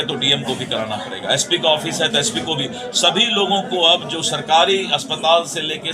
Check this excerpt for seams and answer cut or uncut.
uncut